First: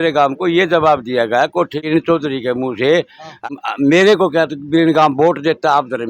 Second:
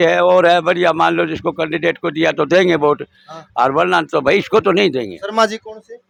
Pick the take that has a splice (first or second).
first